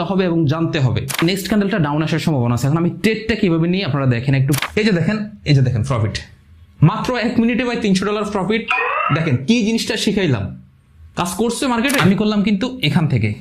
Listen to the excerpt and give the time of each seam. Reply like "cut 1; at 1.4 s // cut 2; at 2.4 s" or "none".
cut 1; at 1.2 s // cut 2; at 4.6 s // cut 3; at 12.0 s